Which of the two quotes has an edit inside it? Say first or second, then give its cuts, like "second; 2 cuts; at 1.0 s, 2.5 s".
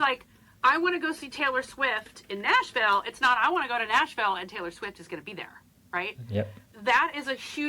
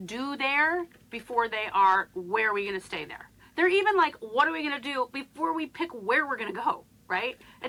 first; 1 cut; at 6.6 s